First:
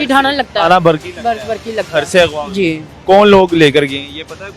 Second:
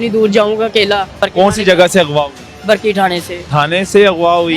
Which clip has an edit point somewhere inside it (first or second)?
second